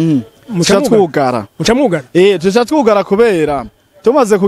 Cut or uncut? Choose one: uncut